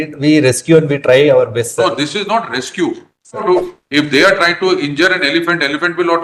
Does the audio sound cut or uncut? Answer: cut